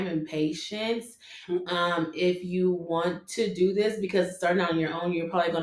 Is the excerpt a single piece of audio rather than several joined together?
yes; 0 cuts

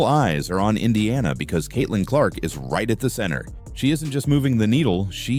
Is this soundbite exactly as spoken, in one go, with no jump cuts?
yes; 0 cuts

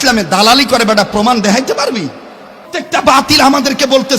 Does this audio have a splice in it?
yes; 1 cut; at 2.7 s

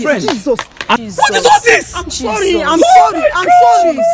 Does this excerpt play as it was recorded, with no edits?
no; 1 cut; at 1.0 s

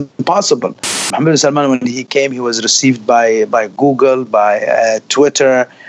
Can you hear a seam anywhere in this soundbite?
yes; 1 cut; at 1.1 s

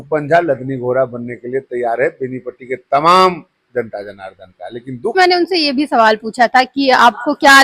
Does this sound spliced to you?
yes; 1 cut; at 5.2 s

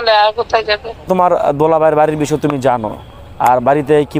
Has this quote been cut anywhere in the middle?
yes; 1 cut; at 1.0 s

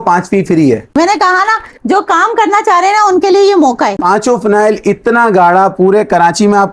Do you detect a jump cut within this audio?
yes; 2 cuts; at 1.0 s, 4.0 s

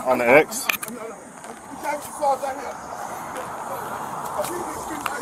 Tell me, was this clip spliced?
no; 0 cuts

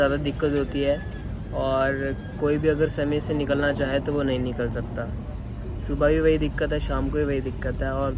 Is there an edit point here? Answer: no; 0 cuts

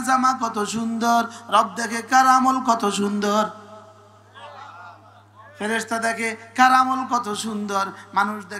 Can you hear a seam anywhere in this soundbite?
no; 0 cuts

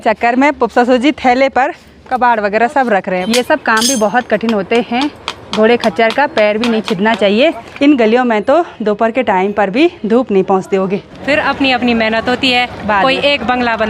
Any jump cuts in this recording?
yes; 3 cuts; at 3.2 s, 7.7 s, 11.1 s

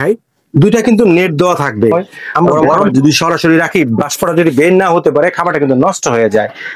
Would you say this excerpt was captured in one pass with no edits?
no; 1 cut; at 2.9 s

